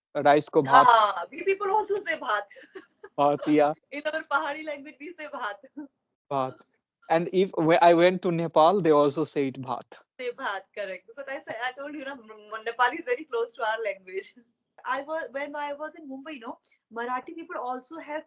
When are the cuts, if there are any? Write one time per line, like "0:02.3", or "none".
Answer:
0:14.7